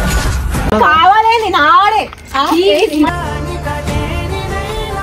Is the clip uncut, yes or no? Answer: yes